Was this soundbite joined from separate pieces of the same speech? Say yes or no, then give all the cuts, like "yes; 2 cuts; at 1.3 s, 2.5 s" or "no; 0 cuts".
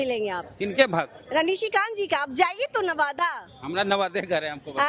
no; 0 cuts